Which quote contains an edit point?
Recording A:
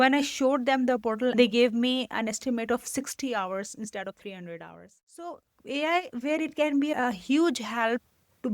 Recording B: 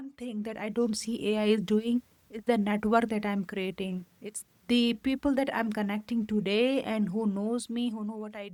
A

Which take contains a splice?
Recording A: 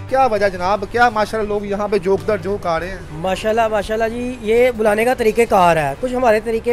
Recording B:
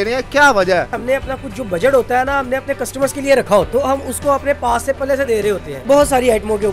B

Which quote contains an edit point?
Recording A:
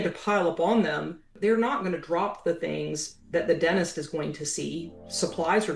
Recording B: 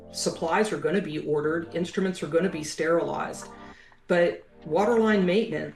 A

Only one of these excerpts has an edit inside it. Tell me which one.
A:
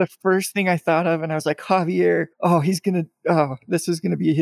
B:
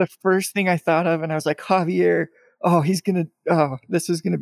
A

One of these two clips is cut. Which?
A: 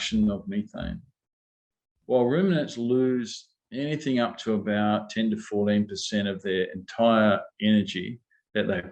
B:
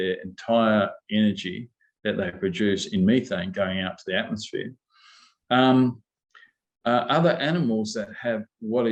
A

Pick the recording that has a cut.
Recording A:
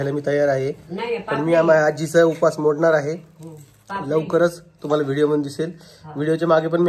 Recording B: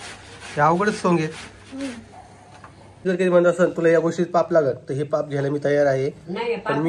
B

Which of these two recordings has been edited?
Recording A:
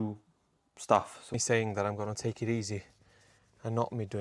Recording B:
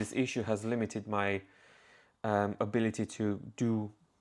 A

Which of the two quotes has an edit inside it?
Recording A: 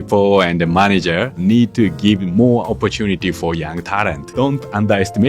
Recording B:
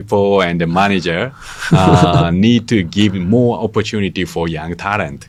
A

